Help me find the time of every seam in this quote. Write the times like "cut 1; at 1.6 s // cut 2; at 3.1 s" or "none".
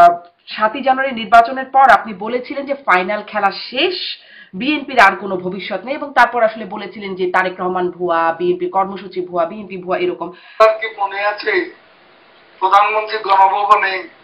cut 1; at 10.6 s